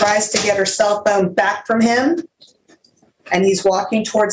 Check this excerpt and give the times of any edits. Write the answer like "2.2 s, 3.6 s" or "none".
none